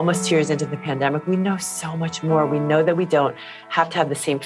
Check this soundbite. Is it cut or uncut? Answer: uncut